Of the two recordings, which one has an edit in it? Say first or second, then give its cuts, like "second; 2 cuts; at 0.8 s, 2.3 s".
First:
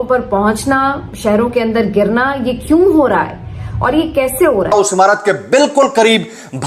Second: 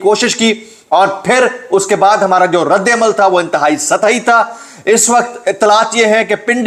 first; 1 cut; at 4.7 s